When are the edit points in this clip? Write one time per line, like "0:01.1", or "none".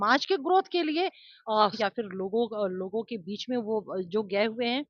0:01.8